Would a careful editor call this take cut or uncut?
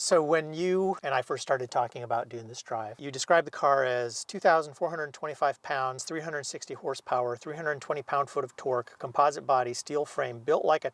cut